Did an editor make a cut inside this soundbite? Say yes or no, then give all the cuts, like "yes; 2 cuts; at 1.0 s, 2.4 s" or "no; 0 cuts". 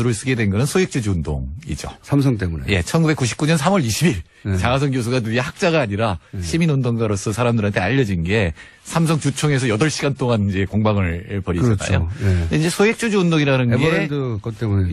yes; 1 cut; at 6.2 s